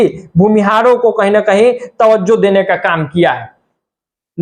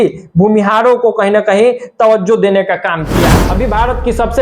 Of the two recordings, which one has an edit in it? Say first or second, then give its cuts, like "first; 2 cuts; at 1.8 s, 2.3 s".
second; 1 cut; at 3.4 s